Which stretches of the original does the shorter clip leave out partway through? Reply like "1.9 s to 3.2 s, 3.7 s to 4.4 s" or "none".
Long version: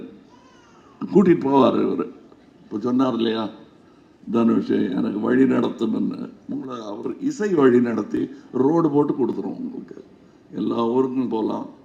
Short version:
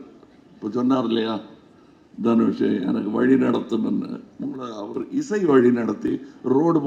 none